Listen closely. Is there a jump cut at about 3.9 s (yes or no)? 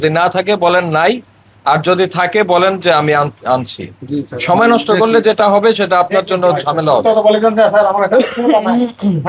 no